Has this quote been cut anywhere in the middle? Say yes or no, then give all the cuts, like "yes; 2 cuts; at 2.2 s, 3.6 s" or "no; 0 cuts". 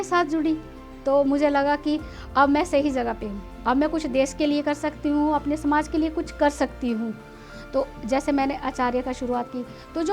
no; 0 cuts